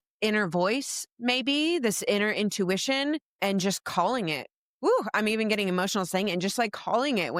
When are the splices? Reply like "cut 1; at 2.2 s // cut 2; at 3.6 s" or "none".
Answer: none

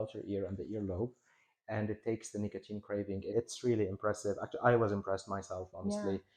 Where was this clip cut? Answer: cut 1; at 3.3 s

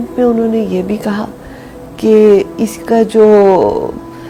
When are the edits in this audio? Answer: none

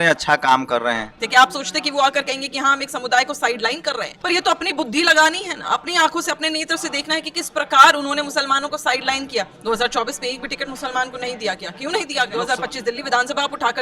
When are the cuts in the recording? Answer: cut 1; at 1.2 s // cut 2; at 4.1 s // cut 3; at 12.3 s

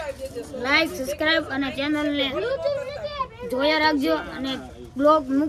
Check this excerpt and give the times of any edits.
none

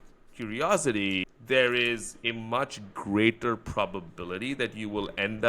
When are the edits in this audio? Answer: cut 1; at 1.3 s

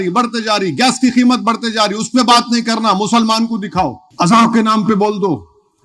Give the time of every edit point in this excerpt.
cut 1; at 4.0 s

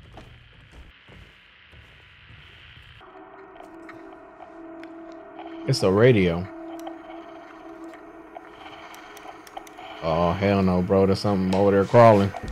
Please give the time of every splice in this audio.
cut 1; at 0.9 s // cut 2; at 3.0 s

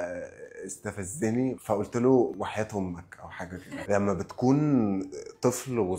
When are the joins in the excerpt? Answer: cut 1; at 2.3 s // cut 2; at 3.8 s

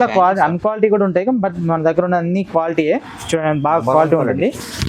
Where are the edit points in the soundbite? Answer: none

